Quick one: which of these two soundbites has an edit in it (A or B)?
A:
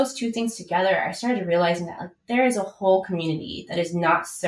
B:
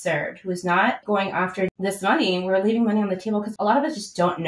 B